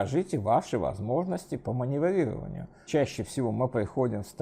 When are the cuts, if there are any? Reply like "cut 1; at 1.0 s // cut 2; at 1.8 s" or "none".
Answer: cut 1; at 2.9 s